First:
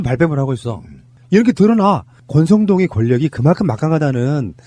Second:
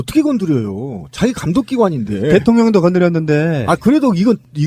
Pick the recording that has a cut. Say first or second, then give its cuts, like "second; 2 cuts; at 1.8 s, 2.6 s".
second; 1 cut; at 2.4 s